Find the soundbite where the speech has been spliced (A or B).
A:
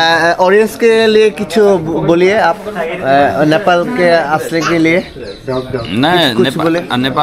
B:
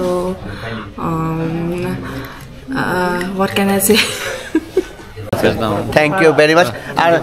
B